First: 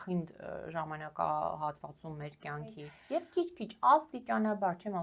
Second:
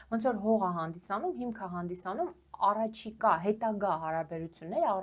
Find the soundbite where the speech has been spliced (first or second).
first